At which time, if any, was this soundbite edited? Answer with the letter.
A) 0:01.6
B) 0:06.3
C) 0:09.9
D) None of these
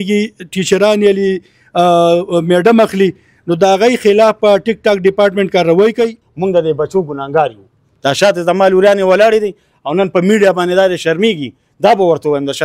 B